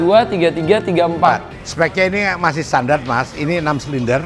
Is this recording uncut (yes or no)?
no